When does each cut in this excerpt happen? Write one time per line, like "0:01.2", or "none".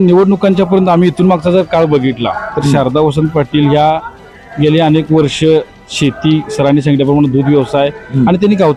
none